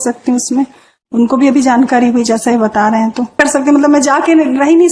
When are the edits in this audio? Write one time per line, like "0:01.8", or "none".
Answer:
0:03.4